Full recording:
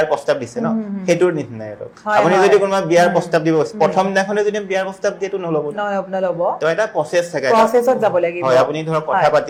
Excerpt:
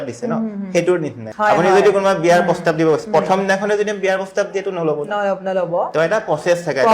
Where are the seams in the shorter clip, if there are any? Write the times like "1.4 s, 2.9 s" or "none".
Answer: 1.2 s

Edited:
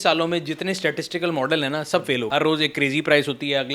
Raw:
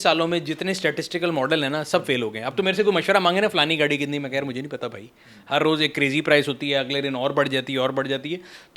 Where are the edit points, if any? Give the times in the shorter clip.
2.3 s

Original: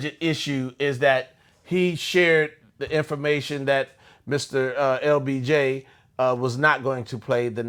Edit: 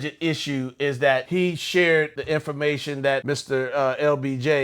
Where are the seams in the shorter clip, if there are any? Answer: 1.3 s, 2.2 s, 3.2 s

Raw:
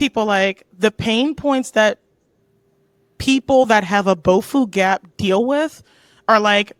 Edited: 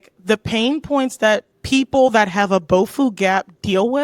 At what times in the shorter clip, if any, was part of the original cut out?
1.5 s

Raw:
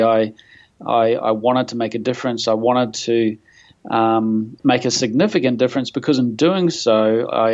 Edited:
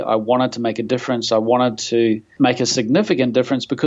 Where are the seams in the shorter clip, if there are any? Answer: 2.3 s

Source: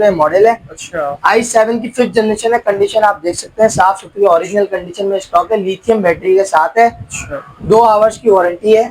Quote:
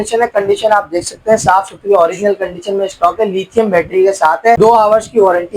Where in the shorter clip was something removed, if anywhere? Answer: 4.6 s

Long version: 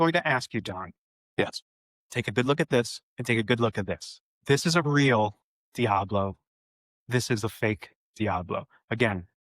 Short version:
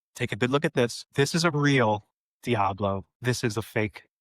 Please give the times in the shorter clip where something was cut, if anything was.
1.0 s, 3.1 s

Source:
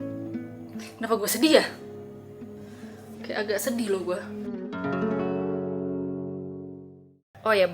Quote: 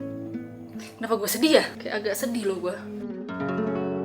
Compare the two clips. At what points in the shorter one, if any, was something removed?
1.8 s

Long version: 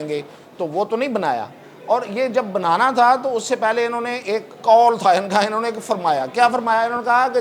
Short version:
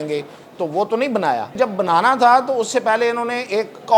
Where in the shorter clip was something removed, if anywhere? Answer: 1.5 s

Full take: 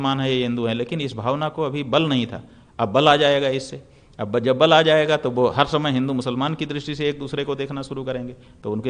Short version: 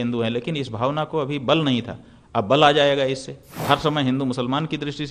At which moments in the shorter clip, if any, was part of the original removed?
3.6 s

